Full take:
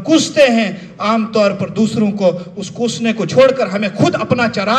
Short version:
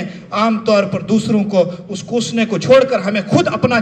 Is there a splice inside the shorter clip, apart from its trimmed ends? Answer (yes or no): no